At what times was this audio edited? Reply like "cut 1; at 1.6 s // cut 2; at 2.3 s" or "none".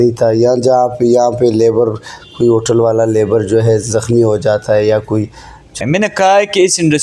cut 1; at 5.7 s